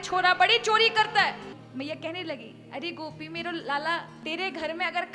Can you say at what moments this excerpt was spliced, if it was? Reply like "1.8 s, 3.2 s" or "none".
1.6 s, 4.1 s